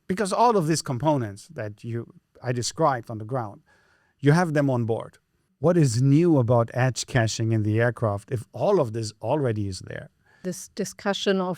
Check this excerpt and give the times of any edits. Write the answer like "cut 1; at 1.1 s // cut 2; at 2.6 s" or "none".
none